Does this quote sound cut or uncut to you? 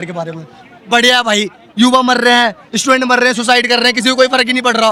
uncut